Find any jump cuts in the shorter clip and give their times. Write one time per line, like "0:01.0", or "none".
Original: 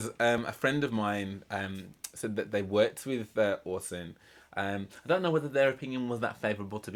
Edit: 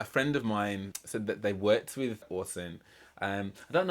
0:00.9
0:02.2